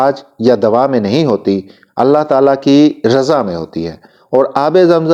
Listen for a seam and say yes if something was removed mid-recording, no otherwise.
no